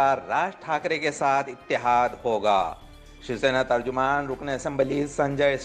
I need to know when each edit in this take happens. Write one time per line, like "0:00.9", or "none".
none